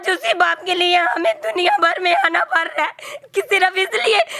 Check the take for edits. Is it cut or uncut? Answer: uncut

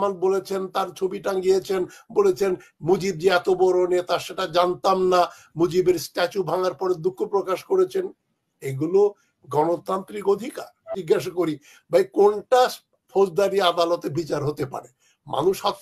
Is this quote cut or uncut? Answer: cut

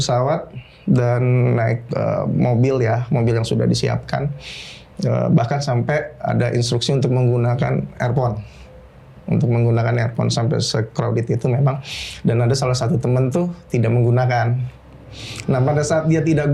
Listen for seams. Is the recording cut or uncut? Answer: uncut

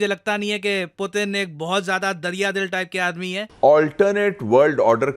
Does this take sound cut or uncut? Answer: cut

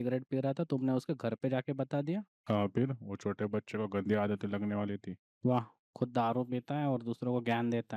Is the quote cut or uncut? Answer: uncut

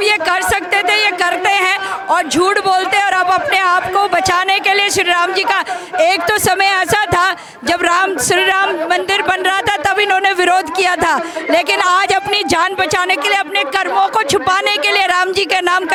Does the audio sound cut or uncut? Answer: uncut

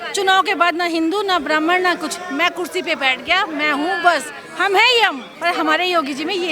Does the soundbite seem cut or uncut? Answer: cut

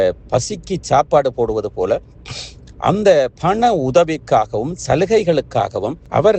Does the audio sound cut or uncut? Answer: uncut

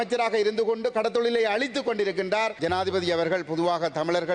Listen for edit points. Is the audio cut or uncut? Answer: cut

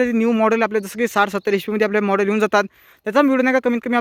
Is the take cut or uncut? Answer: uncut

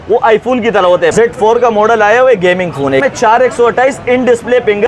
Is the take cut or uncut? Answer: cut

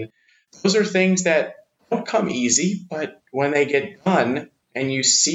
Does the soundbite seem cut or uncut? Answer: cut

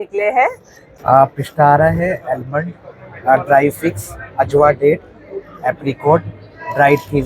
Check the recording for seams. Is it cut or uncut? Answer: cut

